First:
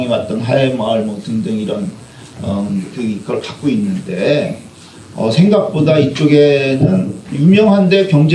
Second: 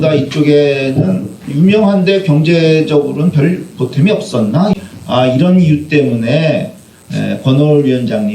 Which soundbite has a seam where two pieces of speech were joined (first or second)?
second